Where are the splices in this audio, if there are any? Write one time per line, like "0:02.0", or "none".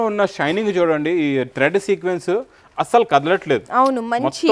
none